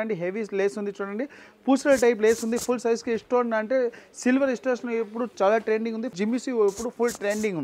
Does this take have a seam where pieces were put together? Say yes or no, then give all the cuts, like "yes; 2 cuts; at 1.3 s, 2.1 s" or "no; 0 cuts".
no; 0 cuts